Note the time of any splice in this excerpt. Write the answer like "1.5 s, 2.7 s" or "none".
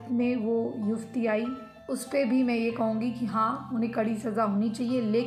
none